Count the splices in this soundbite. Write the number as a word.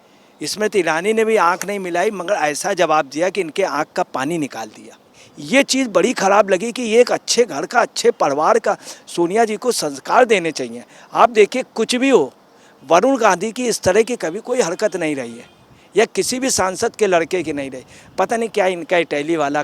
one